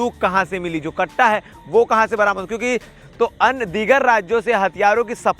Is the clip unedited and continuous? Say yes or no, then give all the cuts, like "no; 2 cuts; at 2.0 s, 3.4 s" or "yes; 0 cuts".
no; 1 cut; at 3.0 s